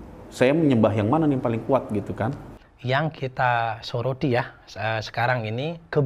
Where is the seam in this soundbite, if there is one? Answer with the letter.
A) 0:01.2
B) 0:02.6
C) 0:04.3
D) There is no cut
B